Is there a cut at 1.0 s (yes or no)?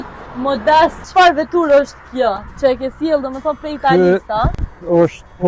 yes